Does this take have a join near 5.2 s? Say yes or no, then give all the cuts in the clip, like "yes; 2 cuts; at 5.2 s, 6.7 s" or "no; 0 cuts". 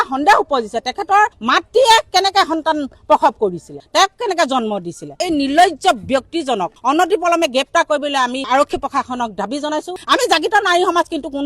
yes; 2 cuts; at 5.2 s, 10.0 s